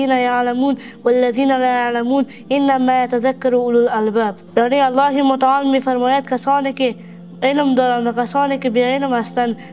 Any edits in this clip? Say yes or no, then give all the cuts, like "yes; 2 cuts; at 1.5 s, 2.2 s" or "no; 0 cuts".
yes; 1 cut; at 4.4 s